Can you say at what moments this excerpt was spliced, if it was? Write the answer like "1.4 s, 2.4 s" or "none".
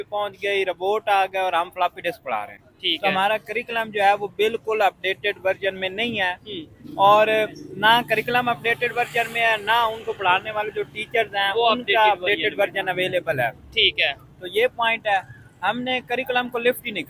none